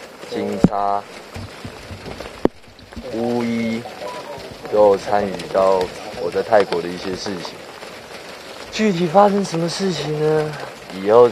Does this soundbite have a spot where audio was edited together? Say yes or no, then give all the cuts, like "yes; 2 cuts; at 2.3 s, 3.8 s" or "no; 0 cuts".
no; 0 cuts